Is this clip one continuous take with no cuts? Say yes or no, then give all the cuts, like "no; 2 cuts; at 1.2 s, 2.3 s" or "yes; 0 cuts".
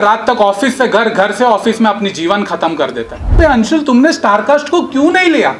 no; 1 cut; at 3.3 s